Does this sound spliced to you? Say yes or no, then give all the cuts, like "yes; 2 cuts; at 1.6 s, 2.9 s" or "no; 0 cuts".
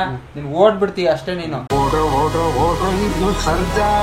no; 0 cuts